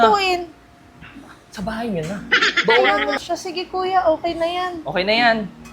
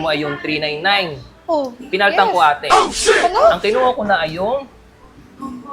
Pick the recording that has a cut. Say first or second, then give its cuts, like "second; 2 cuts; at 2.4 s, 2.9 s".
first; 1 cut; at 3.1 s